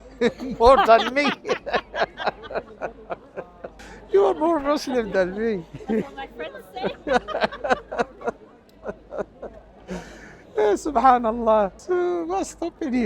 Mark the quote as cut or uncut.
cut